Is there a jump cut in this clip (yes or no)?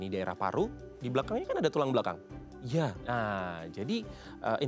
no